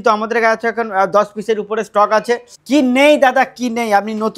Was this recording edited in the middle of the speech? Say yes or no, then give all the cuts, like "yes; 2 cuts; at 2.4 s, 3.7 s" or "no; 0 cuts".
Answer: yes; 1 cut; at 2.5 s